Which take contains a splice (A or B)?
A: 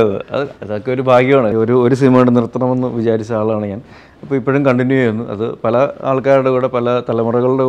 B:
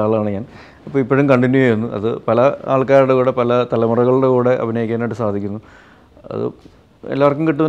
A